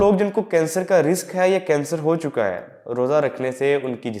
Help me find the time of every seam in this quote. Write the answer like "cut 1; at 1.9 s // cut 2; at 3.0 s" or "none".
none